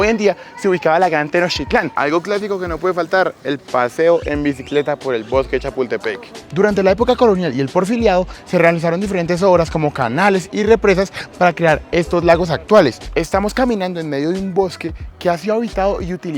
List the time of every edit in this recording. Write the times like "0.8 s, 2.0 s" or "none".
1.8 s, 6.4 s, 13.0 s